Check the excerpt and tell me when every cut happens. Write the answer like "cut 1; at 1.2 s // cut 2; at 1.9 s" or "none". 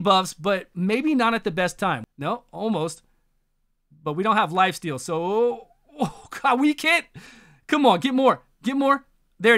cut 1; at 2.0 s

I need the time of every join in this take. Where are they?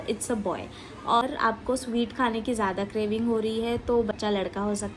cut 1; at 1.2 s // cut 2; at 4.2 s

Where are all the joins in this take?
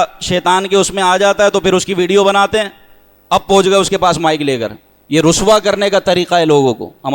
none

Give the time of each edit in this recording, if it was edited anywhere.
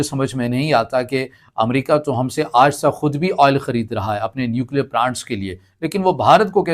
none

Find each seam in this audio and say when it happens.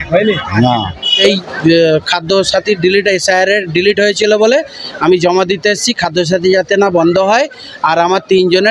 cut 1; at 1.2 s

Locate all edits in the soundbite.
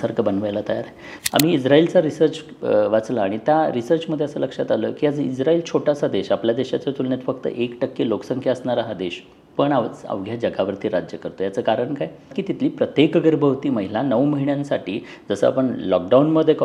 cut 1; at 1.0 s // cut 2; at 12.4 s

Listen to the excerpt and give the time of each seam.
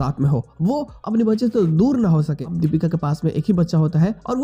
cut 1; at 2.4 s

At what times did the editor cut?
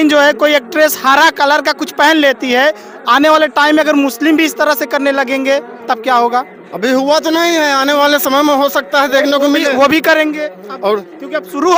none

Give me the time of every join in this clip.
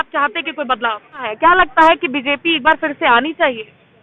cut 1; at 1.3 s

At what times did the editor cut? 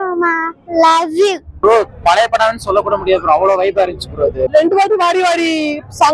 cut 1; at 1.5 s // cut 2; at 4.5 s

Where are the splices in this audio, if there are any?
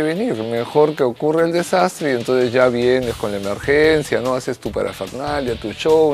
none

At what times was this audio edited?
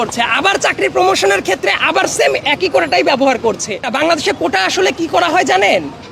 cut 1; at 3.8 s

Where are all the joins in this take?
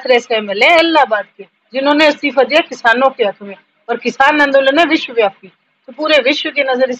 none

